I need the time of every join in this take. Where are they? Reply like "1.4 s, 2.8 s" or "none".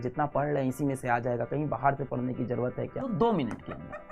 3.1 s